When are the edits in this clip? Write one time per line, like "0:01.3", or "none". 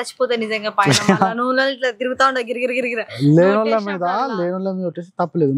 none